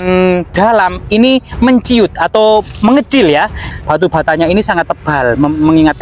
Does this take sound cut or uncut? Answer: cut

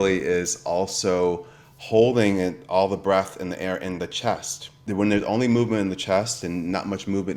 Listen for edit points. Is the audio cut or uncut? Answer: uncut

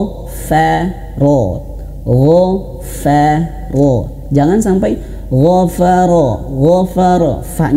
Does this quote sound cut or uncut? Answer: uncut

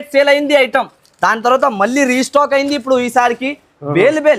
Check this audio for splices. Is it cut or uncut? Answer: uncut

